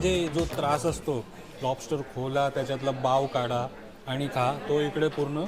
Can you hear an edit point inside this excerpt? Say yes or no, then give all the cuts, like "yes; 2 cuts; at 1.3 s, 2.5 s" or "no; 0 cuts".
no; 0 cuts